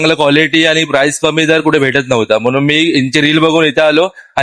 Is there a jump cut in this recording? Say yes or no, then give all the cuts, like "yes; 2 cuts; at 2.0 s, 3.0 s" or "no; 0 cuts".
no; 0 cuts